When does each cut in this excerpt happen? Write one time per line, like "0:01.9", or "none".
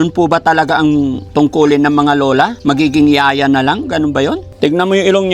0:01.2
0:02.6
0:04.5